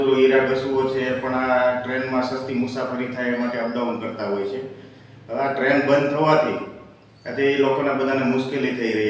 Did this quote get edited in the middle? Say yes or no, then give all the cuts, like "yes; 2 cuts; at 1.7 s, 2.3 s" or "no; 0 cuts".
no; 0 cuts